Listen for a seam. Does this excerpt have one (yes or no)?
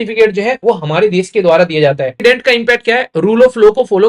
yes